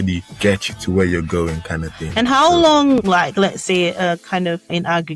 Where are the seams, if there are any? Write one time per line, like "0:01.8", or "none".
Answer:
0:02.0

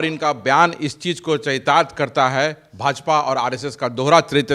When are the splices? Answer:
none

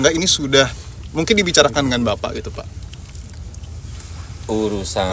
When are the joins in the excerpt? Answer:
none

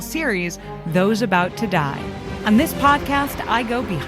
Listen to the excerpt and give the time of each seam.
0:02.3

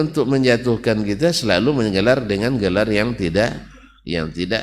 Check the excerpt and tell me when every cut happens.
none

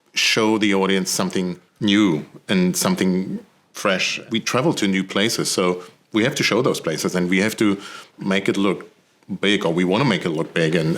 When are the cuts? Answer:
0:04.2

